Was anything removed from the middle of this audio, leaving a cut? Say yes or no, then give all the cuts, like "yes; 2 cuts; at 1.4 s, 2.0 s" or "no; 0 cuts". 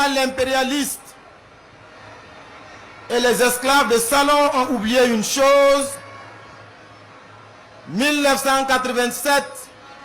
no; 0 cuts